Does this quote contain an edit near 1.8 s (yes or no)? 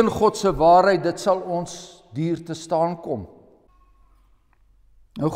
no